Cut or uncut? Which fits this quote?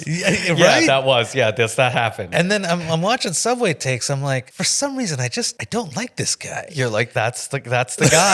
cut